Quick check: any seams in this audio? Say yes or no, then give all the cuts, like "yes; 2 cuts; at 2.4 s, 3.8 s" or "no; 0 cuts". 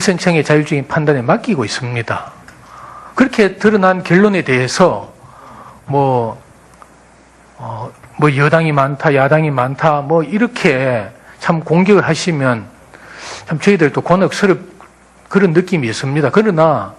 no; 0 cuts